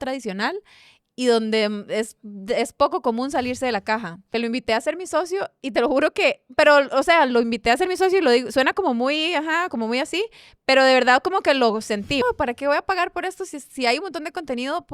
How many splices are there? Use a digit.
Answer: 2